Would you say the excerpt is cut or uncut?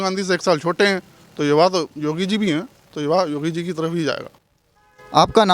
uncut